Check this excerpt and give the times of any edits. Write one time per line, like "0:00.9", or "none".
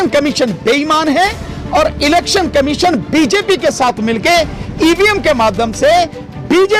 none